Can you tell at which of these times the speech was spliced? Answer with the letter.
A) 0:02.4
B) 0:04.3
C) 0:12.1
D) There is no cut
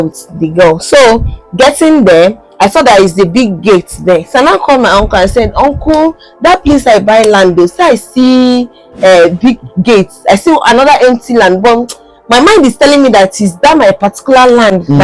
D